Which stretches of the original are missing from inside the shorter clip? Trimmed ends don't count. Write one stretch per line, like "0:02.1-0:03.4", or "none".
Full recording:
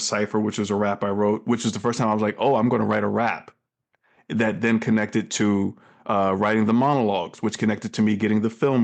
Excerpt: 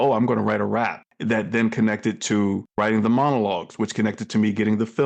0:03.5-0:04.2
0:05.8-0:06.4